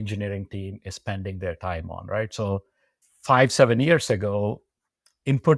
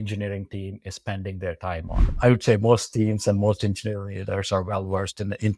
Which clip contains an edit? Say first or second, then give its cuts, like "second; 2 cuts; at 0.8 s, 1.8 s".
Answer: second; 1 cut; at 2.1 s